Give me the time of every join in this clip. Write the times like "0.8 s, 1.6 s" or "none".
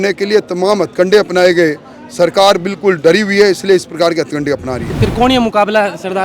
4.9 s

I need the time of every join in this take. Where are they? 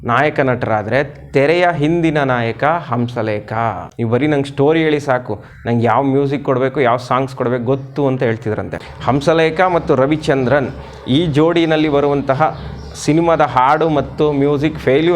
3.9 s, 8.8 s

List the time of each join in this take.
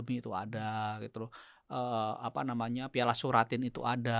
none

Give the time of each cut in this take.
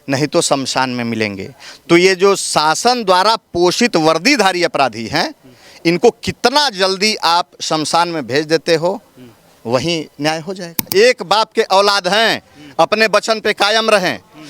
10.9 s

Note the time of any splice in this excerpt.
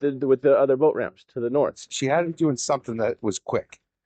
1.8 s

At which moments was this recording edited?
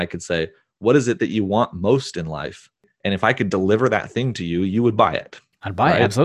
2.9 s

